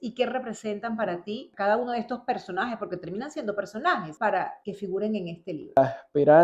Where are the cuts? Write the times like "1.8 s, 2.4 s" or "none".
1.4 s, 4.5 s, 5.8 s